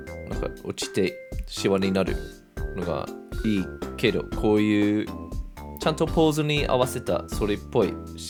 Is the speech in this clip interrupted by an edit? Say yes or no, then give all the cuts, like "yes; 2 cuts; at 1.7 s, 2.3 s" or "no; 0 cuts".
no; 0 cuts